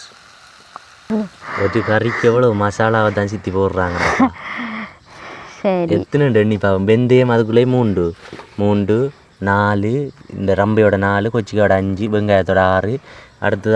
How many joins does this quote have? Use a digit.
1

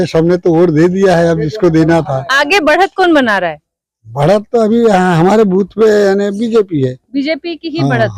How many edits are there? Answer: 0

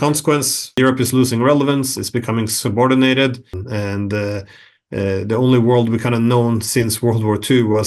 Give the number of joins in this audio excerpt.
1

